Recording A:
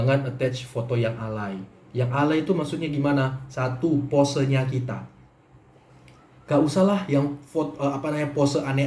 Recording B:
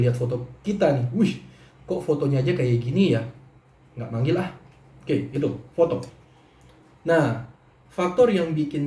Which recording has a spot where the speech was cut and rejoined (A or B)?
B